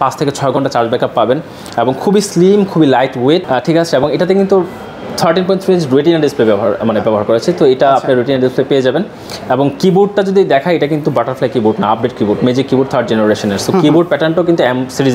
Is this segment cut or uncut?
uncut